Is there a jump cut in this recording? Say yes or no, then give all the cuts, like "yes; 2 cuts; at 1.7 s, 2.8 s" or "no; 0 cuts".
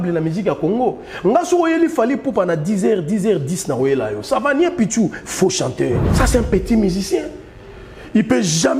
yes; 1 cut; at 6.1 s